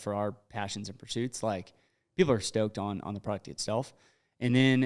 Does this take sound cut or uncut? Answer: uncut